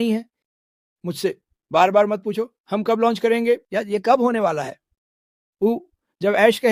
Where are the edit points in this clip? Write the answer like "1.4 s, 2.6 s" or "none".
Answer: none

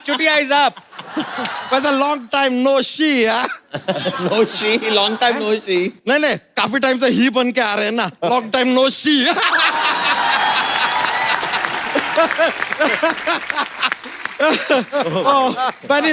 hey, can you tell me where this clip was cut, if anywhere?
none

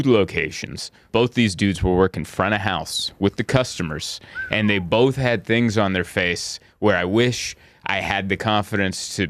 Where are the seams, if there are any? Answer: 1.1 s

